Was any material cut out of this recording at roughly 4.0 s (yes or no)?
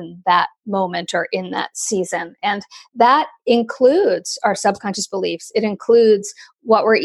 no